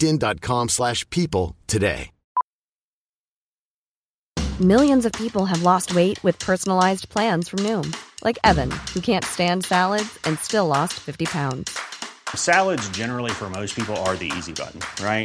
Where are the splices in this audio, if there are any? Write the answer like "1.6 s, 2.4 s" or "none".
2.1 s